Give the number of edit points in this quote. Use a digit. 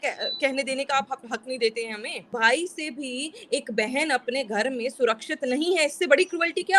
1